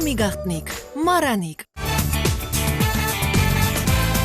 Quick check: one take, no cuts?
no; 1 cut; at 1.8 s

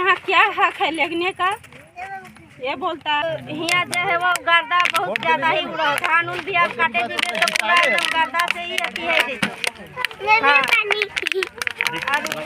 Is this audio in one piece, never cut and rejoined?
no; 1 cut; at 3.2 s

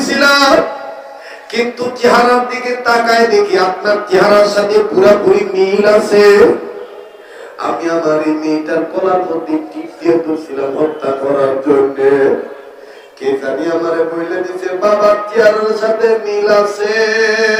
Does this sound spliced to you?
no; 0 cuts

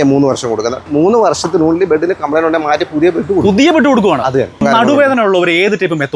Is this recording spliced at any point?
yes; 2 cuts; at 0.8 s, 4.6 s

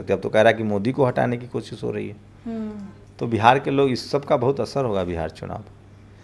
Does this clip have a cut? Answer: no; 0 cuts

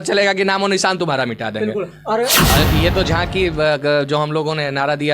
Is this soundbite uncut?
no; 1 cut; at 2.3 s

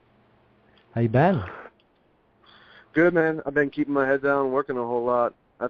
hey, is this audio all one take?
yes; 0 cuts

